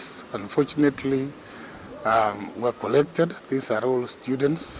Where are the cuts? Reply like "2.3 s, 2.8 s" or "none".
none